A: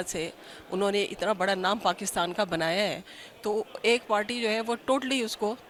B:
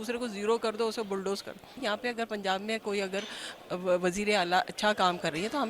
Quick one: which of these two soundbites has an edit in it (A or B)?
B